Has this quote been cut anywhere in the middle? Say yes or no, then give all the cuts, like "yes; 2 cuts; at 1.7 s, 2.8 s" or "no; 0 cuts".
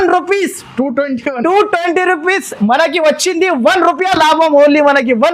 no; 0 cuts